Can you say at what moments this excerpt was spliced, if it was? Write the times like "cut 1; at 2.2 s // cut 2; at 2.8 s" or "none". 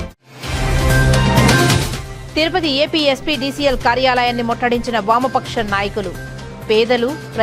cut 1; at 1.9 s